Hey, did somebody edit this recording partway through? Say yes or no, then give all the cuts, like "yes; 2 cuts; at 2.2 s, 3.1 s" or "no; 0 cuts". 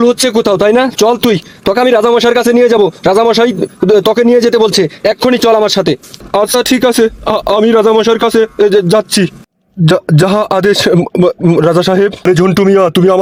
no; 0 cuts